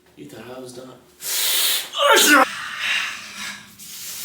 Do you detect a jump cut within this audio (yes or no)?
yes